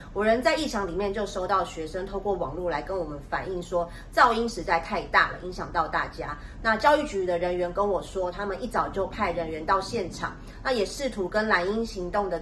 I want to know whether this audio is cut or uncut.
uncut